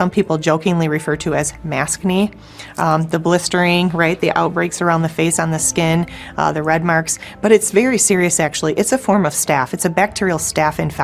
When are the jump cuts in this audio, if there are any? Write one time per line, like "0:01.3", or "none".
none

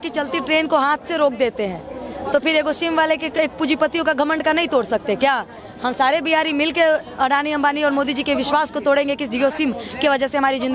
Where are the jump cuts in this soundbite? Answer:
none

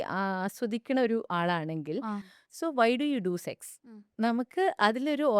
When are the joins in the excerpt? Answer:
0:02.3

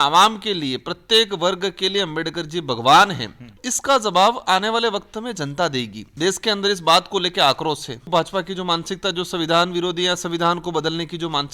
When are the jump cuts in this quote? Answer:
0:03.6
0:06.0
0:08.1

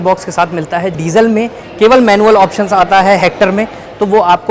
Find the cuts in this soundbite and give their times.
0:01.0

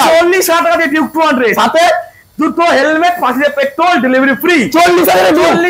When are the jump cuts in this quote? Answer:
none

